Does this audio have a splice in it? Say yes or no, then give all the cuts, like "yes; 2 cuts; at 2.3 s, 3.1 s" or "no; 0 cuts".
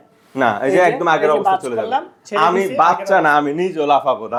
no; 0 cuts